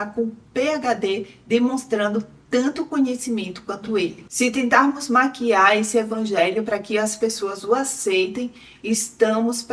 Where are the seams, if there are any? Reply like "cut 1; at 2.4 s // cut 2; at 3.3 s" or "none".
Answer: cut 1; at 4.2 s